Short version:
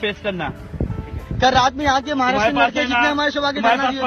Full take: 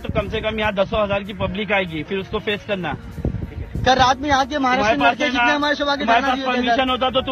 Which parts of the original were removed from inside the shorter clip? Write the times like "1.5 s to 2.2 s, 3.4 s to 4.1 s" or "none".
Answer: none